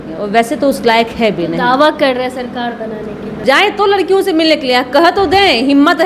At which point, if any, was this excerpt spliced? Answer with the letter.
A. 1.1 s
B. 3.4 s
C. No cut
B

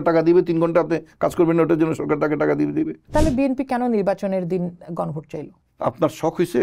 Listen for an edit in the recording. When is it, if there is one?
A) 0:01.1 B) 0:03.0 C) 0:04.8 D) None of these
B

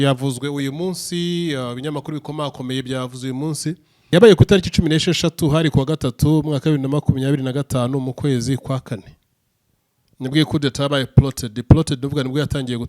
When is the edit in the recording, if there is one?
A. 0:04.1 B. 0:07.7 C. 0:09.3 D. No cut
A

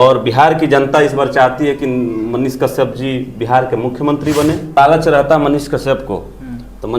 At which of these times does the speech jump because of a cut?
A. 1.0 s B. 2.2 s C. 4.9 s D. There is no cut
C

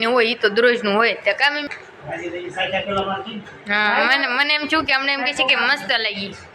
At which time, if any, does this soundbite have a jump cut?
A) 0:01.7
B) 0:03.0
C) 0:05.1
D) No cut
A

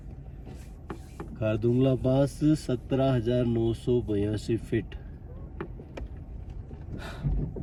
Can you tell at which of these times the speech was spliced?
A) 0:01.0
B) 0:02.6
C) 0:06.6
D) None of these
D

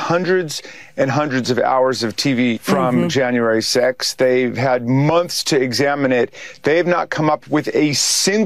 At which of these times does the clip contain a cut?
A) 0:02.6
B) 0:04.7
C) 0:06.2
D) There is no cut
A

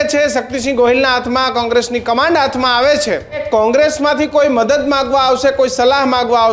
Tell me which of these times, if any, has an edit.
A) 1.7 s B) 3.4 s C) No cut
B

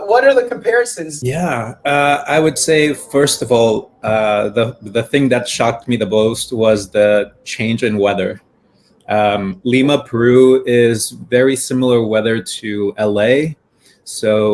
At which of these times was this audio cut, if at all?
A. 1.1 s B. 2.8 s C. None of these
A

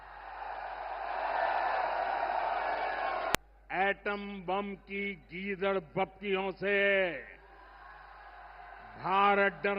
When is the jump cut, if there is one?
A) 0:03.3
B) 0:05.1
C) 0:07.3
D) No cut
A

